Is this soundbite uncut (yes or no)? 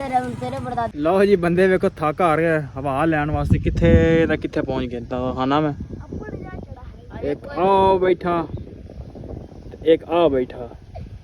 no